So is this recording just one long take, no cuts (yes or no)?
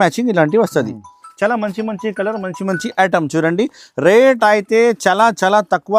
yes